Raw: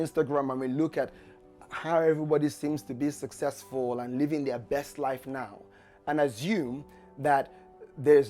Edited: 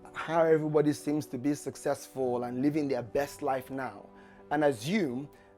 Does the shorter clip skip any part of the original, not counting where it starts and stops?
no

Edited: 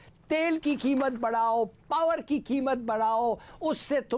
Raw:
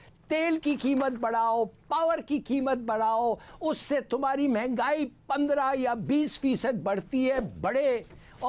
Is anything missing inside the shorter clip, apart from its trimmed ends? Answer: no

